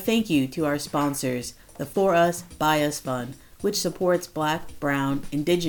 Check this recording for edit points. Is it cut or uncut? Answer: uncut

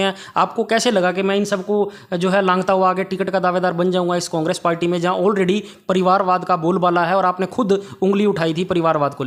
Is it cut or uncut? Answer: uncut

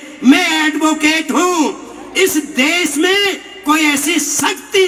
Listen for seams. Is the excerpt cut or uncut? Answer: uncut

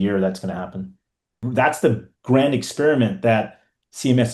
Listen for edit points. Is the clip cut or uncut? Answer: cut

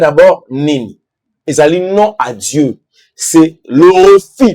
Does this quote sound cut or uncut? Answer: uncut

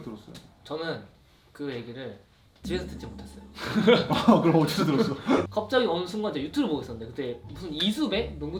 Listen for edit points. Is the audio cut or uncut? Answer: uncut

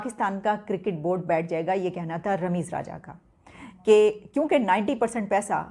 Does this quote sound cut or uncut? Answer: uncut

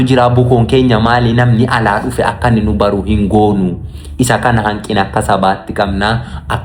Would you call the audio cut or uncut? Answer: uncut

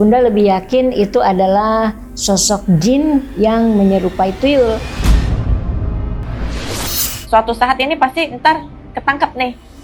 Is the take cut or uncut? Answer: cut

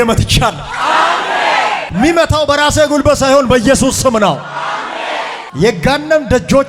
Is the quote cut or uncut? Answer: uncut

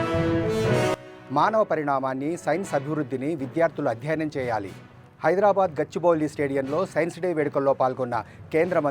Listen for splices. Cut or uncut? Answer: cut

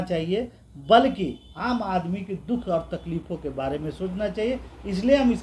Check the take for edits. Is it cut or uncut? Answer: uncut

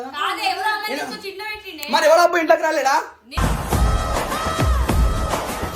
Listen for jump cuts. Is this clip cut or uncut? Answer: uncut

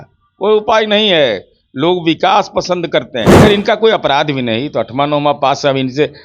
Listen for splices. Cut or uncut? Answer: cut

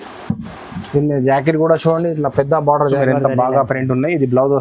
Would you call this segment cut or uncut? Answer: cut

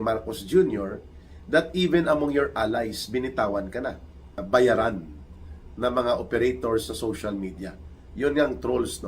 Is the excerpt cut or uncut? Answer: cut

